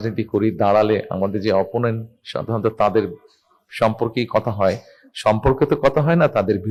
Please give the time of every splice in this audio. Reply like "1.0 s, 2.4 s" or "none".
none